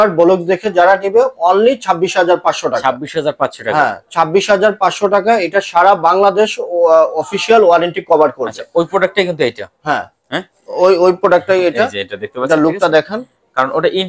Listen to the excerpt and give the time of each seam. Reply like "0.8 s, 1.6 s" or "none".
none